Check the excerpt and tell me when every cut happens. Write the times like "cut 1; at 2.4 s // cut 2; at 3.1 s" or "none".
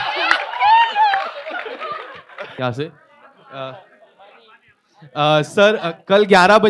cut 1; at 2.5 s